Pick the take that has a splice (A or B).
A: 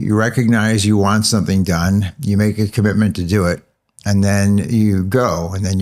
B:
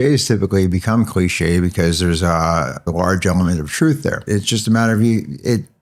B